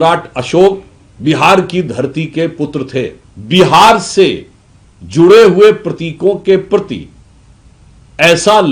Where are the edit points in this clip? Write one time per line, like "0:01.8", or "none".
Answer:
0:03.3